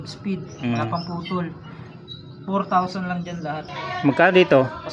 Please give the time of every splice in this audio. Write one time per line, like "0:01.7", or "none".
0:03.6